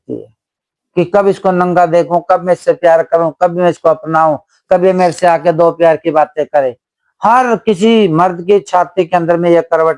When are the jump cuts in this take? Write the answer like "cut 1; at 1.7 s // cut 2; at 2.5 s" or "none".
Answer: none